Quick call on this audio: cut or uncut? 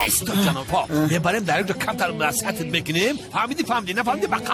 uncut